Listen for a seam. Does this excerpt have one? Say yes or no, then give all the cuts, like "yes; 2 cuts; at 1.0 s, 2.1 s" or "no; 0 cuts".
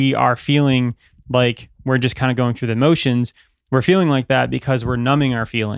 no; 0 cuts